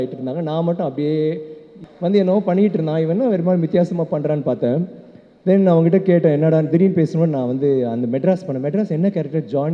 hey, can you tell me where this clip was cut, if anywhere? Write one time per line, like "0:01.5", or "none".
0:01.8